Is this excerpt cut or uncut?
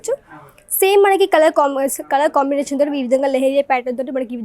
uncut